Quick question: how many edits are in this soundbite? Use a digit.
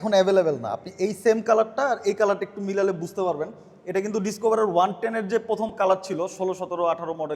0